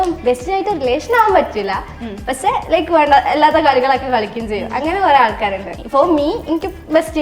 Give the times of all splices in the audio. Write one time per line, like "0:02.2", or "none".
0:05.7